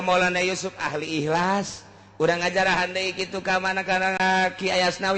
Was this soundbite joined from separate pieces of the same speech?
yes; 1 cut; at 4.2 s

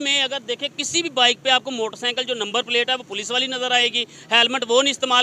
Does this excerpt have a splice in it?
no; 0 cuts

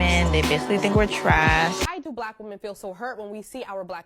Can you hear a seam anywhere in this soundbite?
yes; 1 cut; at 1.9 s

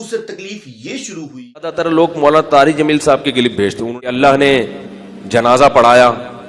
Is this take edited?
yes; 2 cuts; at 1.8 s, 3.9 s

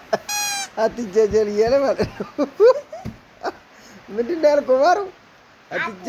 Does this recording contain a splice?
no; 0 cuts

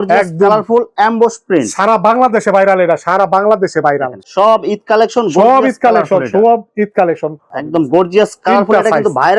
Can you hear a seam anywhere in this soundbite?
yes; 2 cuts; at 4.2 s, 7.5 s

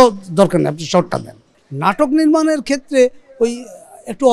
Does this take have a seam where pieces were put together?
yes; 1 cut; at 1.5 s

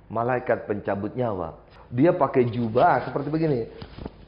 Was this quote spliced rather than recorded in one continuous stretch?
yes; 1 cut; at 1.6 s

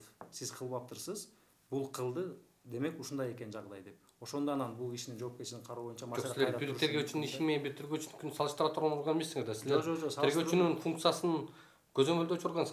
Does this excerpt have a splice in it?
no; 0 cuts

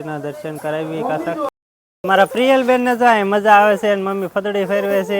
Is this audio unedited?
no; 1 cut; at 1.5 s

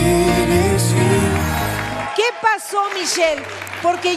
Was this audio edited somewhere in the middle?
no; 0 cuts

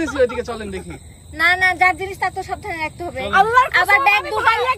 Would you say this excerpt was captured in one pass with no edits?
yes; 0 cuts

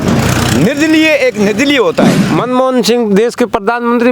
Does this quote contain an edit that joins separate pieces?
yes; 1 cut; at 2.2 s

